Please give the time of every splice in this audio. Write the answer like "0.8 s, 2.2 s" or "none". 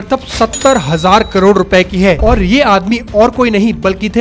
2.2 s